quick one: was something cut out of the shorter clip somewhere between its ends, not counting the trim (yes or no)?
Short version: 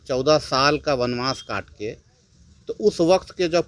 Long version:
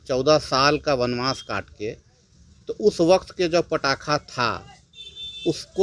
no